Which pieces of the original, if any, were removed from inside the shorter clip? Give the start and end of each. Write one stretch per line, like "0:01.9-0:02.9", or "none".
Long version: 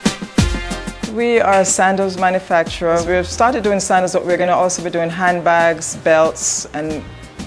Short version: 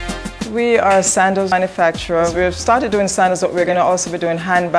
0:02.1-0:02.2